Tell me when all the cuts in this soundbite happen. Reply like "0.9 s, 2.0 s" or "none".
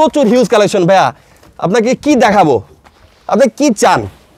none